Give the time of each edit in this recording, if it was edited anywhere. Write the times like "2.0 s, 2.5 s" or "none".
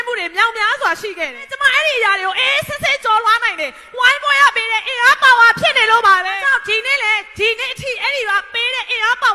1.5 s, 6.4 s